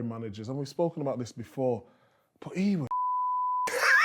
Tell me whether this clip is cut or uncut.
uncut